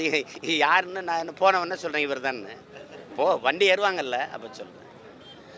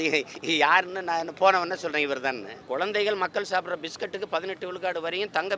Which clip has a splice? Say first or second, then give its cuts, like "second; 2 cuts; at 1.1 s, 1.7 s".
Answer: second; 1 cut; at 2.5 s